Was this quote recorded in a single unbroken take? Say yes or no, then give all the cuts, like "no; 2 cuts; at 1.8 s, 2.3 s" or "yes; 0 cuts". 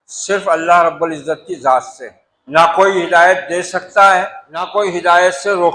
no; 2 cuts; at 1.9 s, 4.1 s